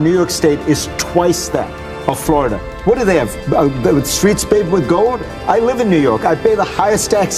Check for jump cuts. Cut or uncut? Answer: uncut